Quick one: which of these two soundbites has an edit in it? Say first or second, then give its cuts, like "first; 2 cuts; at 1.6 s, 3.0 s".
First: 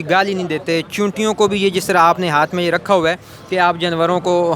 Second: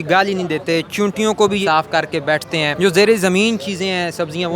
second; 2 cuts; at 1.6 s, 2.7 s